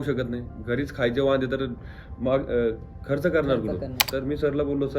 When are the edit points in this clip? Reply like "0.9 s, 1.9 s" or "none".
4.0 s